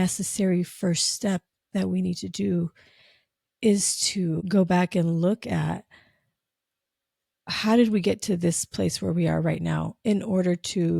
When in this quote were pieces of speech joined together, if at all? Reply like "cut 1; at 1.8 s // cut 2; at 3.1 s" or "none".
cut 1; at 4.4 s